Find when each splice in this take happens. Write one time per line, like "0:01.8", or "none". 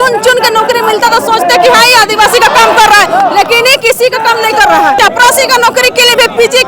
0:04.8